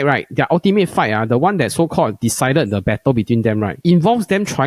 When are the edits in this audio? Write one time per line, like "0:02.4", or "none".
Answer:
0:03.7